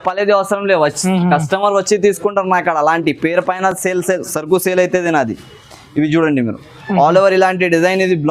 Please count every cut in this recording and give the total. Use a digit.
0